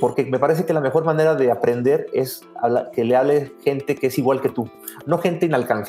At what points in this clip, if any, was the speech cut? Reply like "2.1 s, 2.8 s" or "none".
none